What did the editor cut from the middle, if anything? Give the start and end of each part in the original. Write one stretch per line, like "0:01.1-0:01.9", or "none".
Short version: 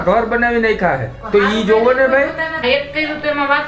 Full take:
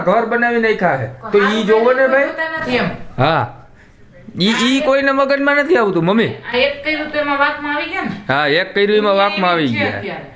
0:02.5-0:06.4